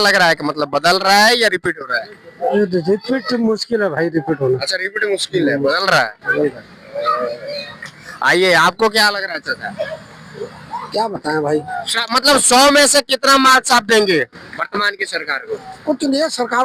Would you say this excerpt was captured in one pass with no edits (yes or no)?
yes